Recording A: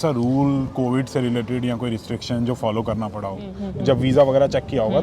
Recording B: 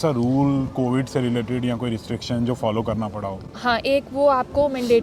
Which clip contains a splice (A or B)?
A